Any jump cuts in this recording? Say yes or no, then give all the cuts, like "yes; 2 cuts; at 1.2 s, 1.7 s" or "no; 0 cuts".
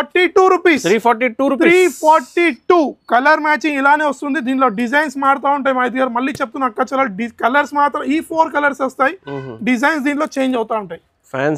no; 0 cuts